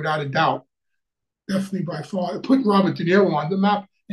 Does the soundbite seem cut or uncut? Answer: uncut